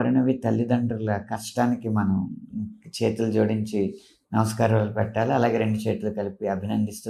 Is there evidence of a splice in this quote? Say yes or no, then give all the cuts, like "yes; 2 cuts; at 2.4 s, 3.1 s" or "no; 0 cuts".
no; 0 cuts